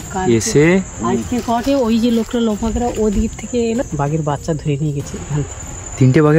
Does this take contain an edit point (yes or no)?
yes